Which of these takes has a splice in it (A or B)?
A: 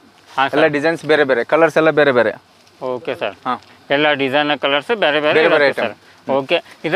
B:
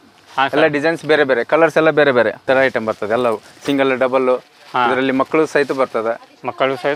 B